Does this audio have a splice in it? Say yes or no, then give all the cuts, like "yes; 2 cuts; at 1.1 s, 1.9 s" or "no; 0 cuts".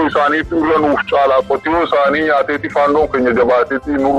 no; 0 cuts